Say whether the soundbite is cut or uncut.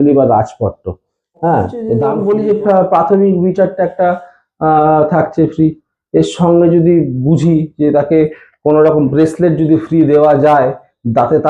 cut